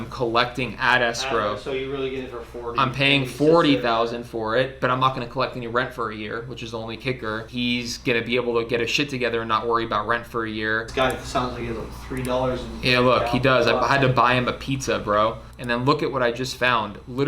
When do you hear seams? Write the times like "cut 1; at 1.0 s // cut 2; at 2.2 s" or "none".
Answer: cut 1; at 4.7 s // cut 2; at 7.5 s // cut 3; at 10.9 s // cut 4; at 15.5 s